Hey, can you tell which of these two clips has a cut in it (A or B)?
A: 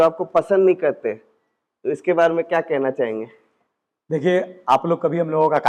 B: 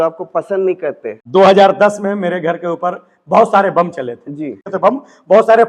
B